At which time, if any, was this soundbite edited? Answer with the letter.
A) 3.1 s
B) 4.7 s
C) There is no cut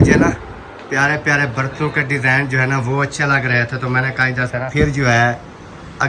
B